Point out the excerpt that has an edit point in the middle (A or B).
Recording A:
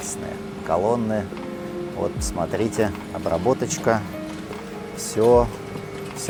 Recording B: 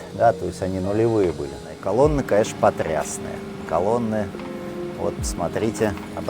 B